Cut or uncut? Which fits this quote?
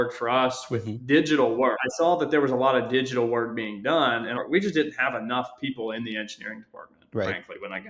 cut